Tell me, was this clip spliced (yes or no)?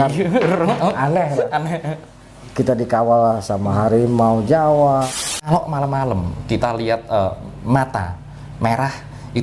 yes